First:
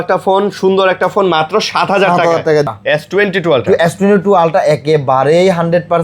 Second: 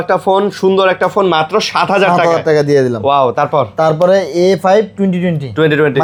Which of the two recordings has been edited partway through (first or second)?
first